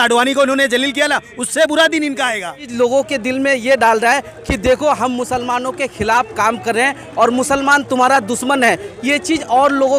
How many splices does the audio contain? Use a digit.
1